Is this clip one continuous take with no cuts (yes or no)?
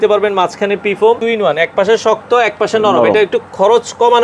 no